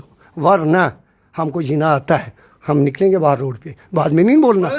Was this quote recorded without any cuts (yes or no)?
yes